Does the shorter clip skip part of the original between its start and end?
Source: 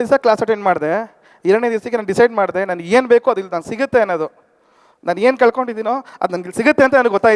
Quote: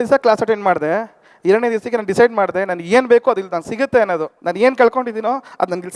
yes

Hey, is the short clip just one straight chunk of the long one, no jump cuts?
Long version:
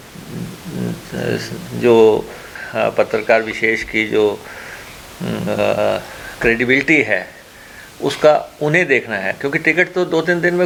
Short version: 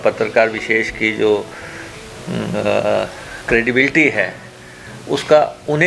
yes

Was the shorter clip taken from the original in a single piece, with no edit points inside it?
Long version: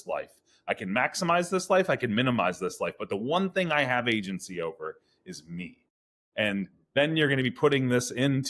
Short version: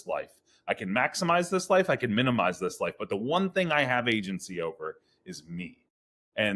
yes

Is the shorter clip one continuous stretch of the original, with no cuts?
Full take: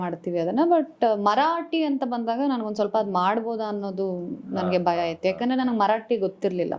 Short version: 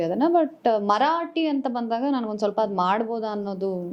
yes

